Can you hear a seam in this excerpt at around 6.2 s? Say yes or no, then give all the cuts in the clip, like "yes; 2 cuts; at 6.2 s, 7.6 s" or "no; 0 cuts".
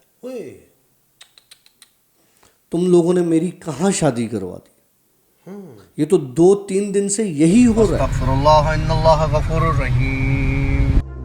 no; 1 cut; at 8.1 s